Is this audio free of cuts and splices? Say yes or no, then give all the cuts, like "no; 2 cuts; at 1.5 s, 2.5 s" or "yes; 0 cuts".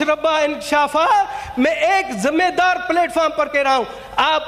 yes; 0 cuts